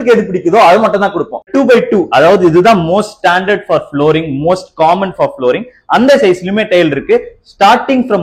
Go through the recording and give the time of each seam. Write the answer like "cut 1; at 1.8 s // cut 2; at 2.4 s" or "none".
cut 1; at 1.4 s